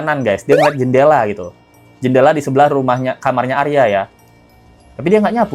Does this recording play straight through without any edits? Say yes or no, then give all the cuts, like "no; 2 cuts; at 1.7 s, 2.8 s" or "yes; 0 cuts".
yes; 0 cuts